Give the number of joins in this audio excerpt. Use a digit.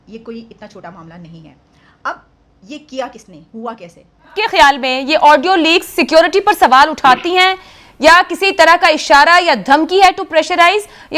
1